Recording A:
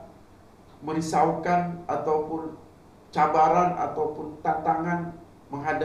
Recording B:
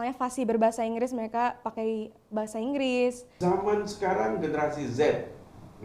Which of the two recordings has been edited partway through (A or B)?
B